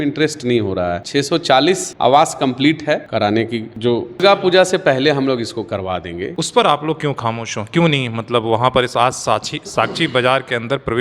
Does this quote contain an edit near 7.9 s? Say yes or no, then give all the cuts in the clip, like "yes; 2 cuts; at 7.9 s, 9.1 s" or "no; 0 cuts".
no; 4 cuts; at 1.0 s, 3.1 s, 4.2 s, 6.3 s